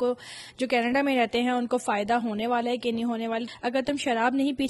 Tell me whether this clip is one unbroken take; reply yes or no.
no